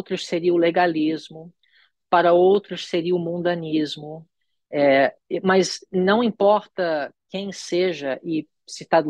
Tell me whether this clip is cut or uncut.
uncut